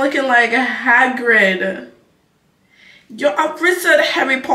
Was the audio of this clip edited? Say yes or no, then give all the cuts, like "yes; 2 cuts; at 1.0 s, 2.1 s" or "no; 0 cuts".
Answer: no; 0 cuts